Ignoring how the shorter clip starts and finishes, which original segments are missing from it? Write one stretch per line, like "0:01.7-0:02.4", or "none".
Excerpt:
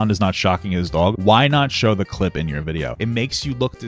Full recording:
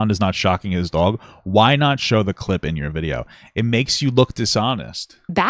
0:01.2-0:01.5
0:03.2-0:03.5